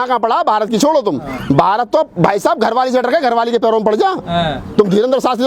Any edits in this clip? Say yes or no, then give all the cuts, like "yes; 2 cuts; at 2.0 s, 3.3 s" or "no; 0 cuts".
no; 0 cuts